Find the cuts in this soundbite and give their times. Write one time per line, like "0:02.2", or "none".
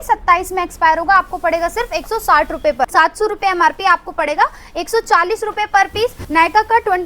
0:02.9
0:06.2